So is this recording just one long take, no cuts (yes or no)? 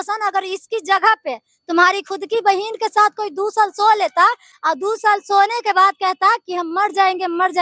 yes